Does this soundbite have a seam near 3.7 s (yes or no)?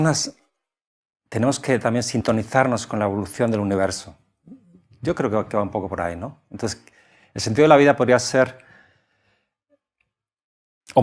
yes